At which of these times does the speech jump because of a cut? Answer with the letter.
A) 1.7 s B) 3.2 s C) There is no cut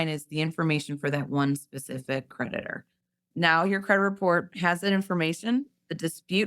B